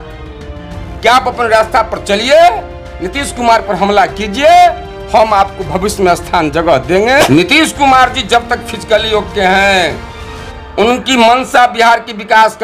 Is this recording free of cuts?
no; 1 cut; at 7.3 s

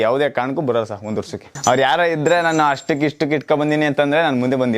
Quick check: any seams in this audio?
yes; 1 cut; at 1.4 s

